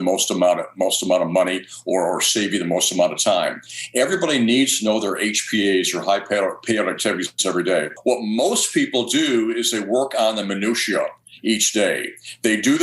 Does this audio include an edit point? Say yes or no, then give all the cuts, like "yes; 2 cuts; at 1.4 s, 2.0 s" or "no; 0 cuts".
yes; 1 cut; at 7.9 s